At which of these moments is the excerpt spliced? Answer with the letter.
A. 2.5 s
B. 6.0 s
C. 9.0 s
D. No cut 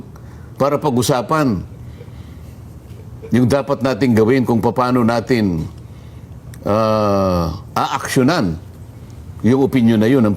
D